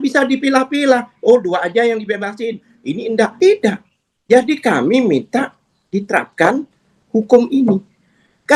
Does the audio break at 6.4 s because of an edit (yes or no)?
no